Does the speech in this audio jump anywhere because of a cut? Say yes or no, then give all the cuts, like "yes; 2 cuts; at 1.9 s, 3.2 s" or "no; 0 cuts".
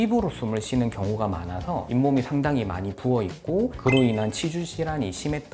no; 0 cuts